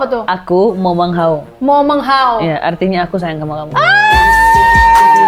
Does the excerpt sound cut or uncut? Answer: uncut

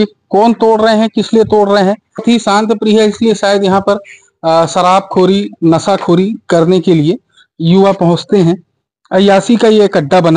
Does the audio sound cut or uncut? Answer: cut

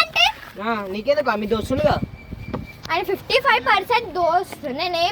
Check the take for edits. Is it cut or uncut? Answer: uncut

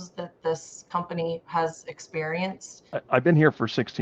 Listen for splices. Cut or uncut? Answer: cut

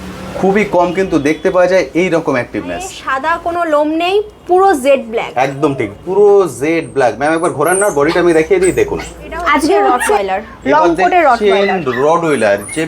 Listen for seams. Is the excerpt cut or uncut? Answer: cut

